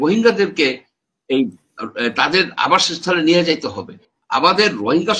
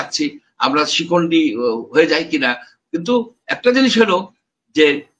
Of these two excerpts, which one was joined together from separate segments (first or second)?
first